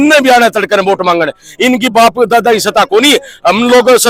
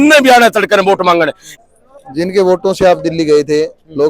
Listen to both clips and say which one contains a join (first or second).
second